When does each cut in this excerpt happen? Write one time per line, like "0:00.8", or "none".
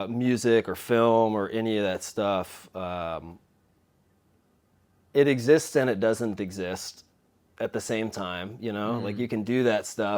none